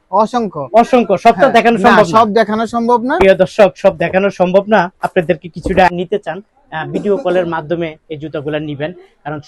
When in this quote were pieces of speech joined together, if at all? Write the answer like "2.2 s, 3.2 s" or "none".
5.9 s

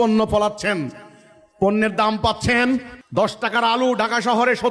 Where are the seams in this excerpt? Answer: 3.0 s

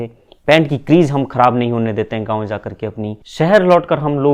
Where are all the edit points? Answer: 3.2 s

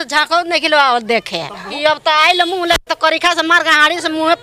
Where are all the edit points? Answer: 1.7 s

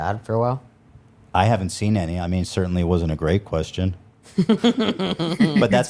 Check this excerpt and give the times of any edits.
none

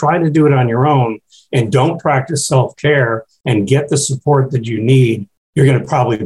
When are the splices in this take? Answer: 5.4 s

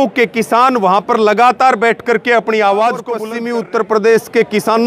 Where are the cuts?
3.2 s

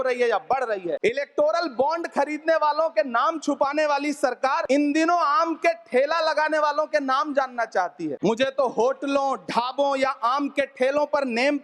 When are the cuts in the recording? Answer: 1.0 s, 4.6 s, 8.2 s

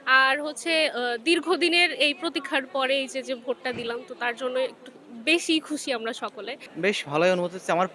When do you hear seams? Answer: 6.6 s

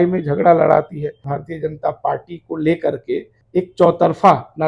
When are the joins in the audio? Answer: 1.3 s, 3.4 s

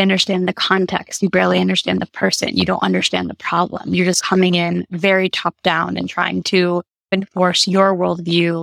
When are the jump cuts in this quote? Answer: 7.1 s

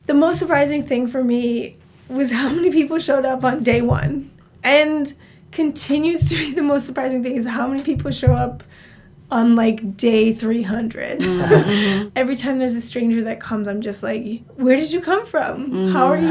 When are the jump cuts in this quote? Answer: 3.6 s, 12.1 s

